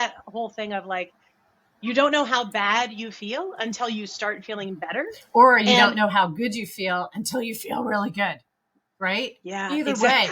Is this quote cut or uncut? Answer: uncut